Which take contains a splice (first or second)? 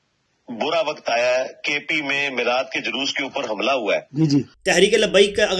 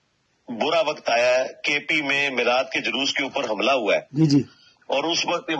first